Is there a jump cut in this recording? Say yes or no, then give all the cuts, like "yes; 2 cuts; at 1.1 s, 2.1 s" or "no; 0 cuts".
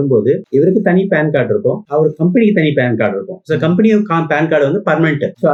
no; 0 cuts